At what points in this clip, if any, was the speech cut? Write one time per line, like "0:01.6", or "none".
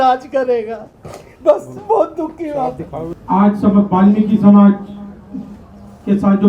none